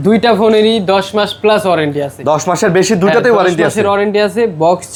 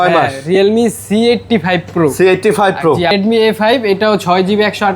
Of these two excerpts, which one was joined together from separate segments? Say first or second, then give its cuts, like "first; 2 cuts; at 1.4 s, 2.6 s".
second; 1 cut; at 3.1 s